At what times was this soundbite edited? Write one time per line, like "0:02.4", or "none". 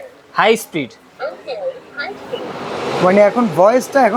none